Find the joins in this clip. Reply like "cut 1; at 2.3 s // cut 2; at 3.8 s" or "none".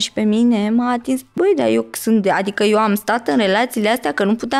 cut 1; at 1.3 s